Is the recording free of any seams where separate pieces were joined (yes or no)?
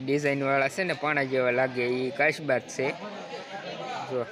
yes